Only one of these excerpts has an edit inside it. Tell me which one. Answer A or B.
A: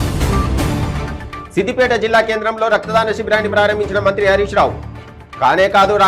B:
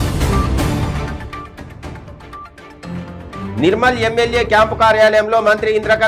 B